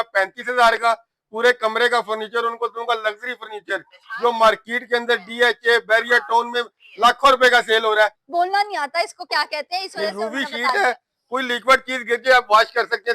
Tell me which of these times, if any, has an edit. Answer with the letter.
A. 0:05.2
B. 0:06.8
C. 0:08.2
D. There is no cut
C